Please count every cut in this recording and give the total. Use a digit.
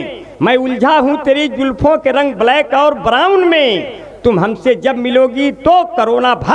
0